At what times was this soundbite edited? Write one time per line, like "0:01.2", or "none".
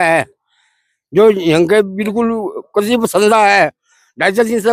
none